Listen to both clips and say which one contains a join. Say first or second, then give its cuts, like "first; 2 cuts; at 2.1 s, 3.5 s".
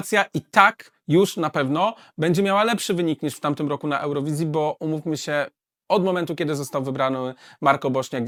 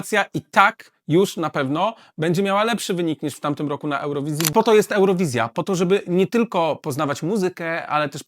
second; 1 cut; at 4.5 s